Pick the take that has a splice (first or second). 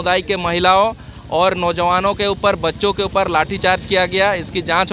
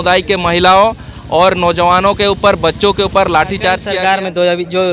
second